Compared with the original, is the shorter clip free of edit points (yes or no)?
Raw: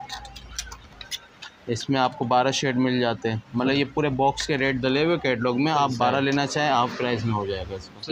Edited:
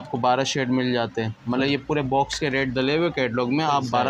yes